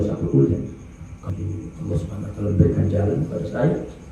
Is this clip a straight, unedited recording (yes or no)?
no